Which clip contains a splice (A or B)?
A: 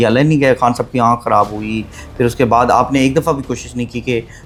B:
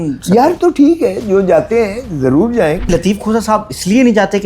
B